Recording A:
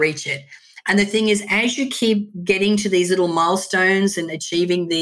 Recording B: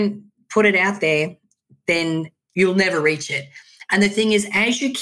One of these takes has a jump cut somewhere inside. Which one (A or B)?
B